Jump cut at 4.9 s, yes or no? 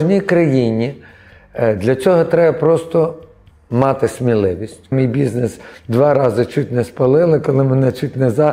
yes